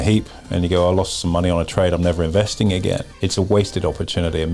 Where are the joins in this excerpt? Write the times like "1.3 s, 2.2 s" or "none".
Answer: 3.1 s